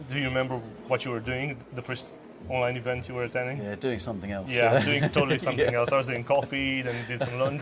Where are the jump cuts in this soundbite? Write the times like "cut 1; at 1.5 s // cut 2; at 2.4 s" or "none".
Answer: none